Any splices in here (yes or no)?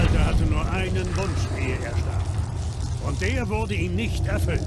no